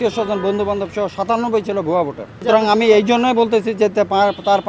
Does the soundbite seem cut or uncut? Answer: uncut